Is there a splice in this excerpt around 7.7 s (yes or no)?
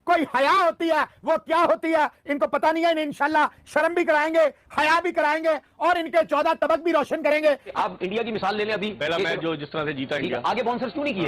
yes